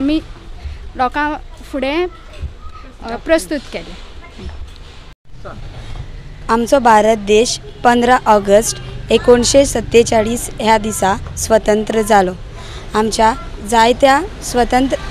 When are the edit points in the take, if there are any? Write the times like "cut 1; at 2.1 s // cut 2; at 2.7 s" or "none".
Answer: cut 1; at 5.2 s